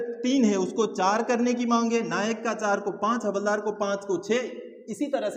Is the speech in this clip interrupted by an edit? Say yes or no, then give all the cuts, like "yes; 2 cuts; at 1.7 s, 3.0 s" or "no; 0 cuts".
no; 0 cuts